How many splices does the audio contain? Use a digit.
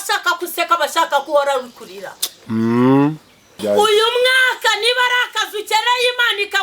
1